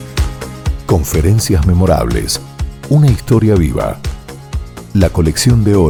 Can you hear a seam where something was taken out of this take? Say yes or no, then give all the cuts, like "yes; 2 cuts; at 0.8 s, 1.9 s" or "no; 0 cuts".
no; 0 cuts